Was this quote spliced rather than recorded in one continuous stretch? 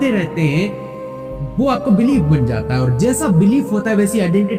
no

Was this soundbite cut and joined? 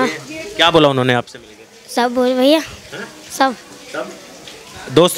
no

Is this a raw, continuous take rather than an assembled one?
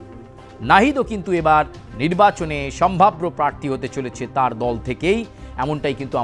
yes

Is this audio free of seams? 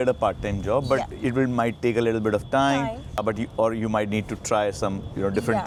yes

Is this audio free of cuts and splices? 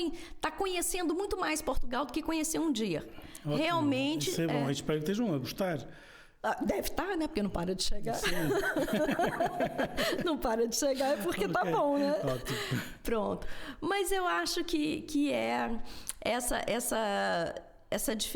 yes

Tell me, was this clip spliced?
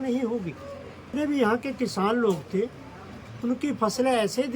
yes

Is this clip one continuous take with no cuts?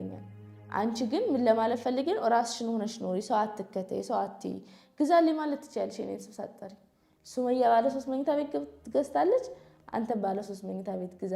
yes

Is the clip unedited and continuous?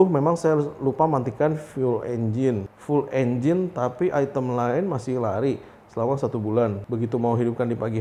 no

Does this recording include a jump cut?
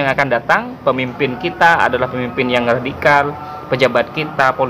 no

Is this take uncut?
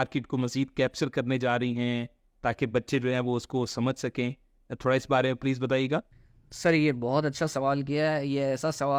yes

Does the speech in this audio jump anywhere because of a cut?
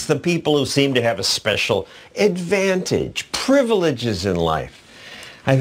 yes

